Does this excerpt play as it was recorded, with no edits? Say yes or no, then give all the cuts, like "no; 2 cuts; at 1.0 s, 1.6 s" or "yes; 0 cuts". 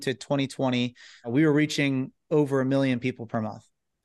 no; 1 cut; at 1.3 s